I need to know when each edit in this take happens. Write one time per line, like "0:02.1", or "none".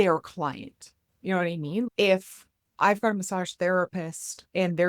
0:01.9